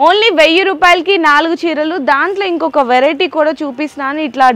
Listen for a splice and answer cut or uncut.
uncut